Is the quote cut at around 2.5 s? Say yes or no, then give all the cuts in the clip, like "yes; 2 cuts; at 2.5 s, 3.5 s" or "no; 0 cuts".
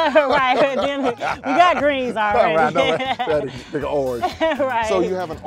no; 0 cuts